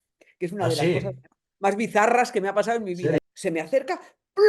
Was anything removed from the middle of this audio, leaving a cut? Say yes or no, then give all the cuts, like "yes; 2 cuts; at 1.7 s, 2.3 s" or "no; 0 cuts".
yes; 1 cut; at 3.2 s